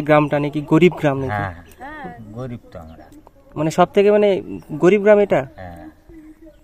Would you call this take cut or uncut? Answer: uncut